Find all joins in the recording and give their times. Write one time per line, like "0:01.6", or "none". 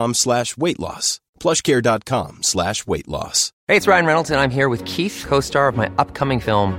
none

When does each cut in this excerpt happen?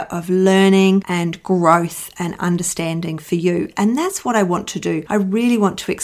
none

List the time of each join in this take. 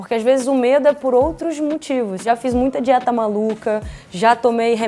0:02.2

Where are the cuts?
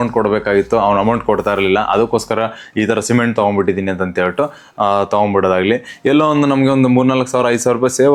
none

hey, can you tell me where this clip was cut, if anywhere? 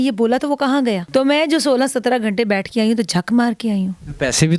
0:01.0

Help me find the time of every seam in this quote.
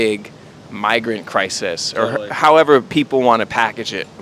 0:02.9

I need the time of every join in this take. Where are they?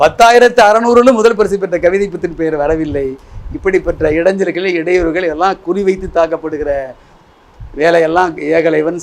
none

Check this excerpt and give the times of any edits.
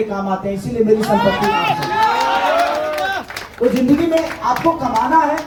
none

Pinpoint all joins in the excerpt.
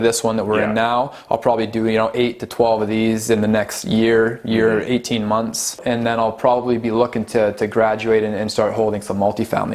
0:05.8

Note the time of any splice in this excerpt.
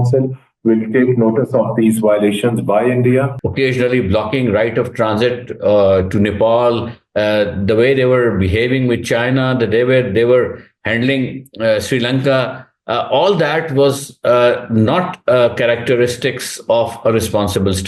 0:03.4

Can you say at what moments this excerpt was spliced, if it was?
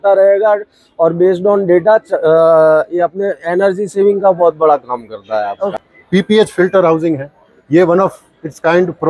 0:05.9

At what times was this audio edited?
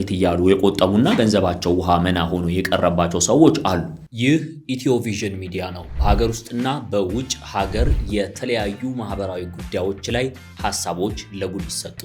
0:04.0

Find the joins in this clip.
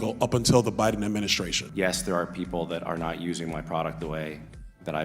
0:01.6

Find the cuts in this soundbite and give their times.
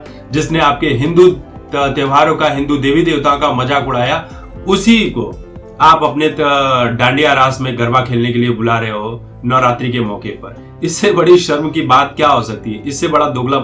none

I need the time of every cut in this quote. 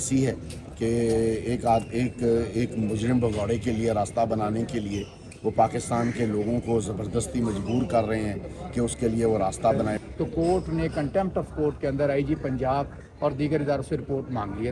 0:10.0

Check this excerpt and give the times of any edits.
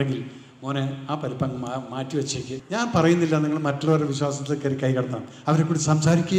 0:02.6

